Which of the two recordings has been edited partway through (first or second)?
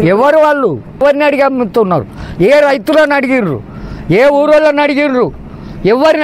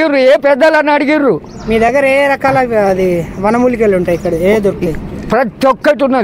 first